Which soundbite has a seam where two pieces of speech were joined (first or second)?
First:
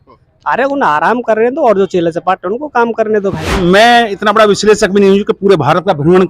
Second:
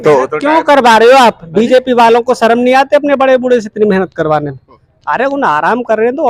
first